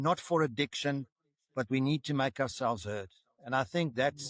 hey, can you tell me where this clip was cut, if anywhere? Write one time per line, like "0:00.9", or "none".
none